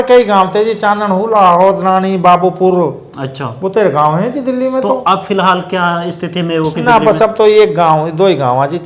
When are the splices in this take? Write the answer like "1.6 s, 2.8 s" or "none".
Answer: none